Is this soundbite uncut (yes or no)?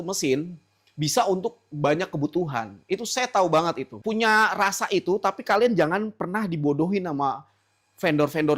no